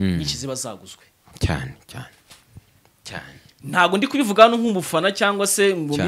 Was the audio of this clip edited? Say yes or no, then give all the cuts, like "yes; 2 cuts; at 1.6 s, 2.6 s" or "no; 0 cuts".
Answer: no; 0 cuts